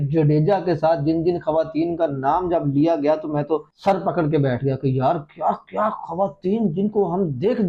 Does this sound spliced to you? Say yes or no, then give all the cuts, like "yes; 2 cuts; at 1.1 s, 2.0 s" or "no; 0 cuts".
no; 0 cuts